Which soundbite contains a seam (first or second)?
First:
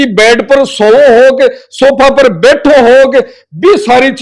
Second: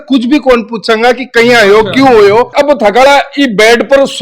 second